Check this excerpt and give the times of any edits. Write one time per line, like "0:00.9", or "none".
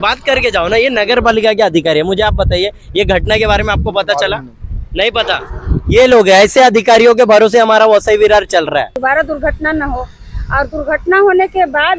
0:08.9